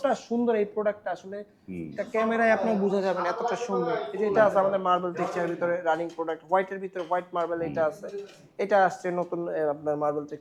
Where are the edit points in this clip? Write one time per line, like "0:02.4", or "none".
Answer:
none